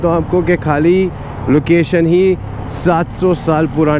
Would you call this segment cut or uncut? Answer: uncut